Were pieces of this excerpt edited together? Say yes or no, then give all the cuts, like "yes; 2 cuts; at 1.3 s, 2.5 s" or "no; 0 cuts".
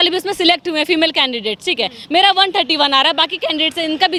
no; 0 cuts